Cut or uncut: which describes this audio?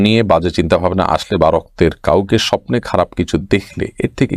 uncut